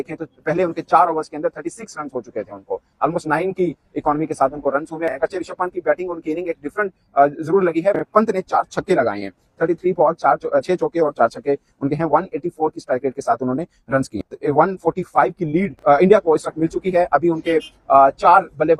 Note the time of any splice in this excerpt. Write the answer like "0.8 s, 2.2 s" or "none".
none